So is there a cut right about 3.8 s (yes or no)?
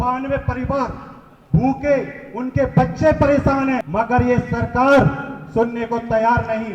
yes